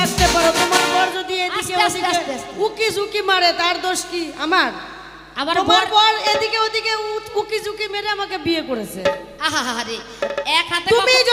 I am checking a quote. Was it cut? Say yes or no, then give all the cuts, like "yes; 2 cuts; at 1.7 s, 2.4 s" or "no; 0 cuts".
no; 0 cuts